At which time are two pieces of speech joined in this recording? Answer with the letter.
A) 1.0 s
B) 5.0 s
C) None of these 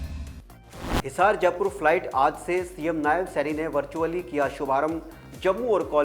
A